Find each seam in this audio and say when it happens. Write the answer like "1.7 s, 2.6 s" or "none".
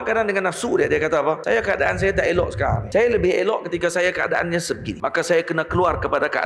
1.4 s, 2.8 s, 4.9 s